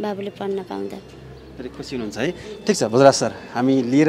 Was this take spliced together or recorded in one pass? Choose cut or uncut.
uncut